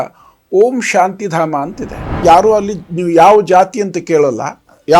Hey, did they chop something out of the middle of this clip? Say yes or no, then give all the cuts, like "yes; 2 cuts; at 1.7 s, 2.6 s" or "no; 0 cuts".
yes; 1 cut; at 2.2 s